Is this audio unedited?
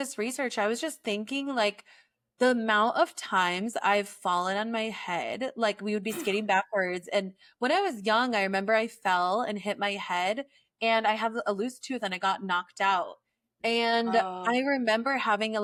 yes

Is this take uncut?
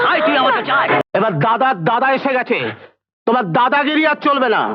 no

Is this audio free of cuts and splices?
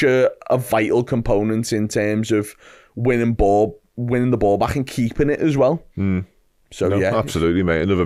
yes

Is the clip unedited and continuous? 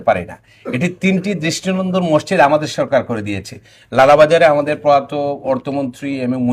yes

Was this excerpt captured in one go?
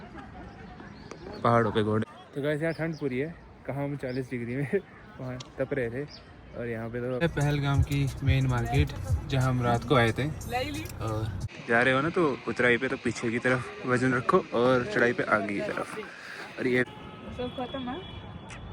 no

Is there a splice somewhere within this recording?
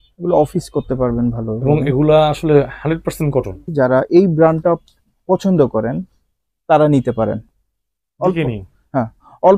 yes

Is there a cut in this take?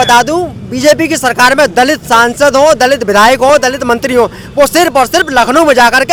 no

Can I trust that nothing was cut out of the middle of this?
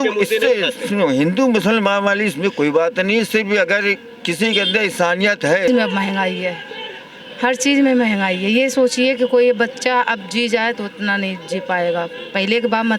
no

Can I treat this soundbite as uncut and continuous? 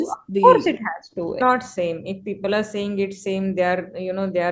no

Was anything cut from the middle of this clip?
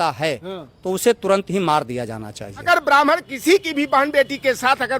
yes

